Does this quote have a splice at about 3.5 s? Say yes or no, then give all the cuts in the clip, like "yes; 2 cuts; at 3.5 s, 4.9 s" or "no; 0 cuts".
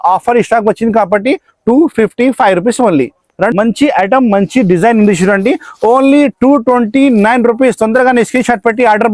yes; 1 cut; at 3.5 s